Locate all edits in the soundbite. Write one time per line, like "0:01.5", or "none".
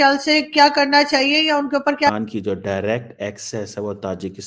0:02.1